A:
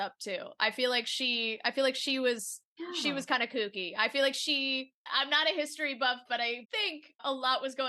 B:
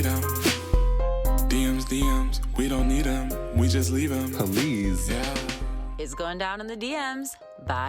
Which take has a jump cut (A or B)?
A